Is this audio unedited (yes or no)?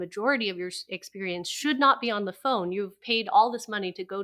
yes